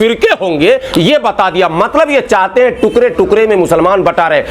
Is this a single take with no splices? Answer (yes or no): yes